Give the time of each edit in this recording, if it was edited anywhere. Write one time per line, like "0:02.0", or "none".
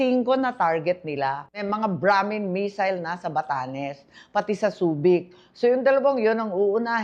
0:01.6